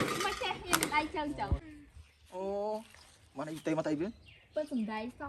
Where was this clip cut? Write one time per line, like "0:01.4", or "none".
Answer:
0:01.6

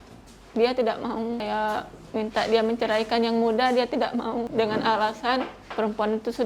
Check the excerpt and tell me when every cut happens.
0:01.4
0:04.5
0:05.6

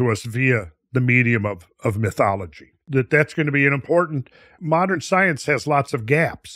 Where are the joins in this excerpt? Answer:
0:02.8
0:04.5

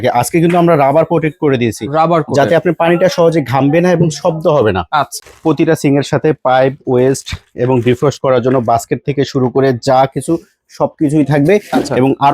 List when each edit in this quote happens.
0:05.2

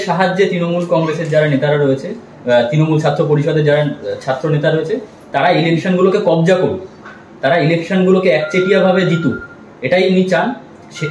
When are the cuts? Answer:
none

